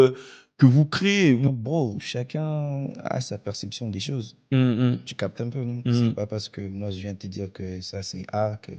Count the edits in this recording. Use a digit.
1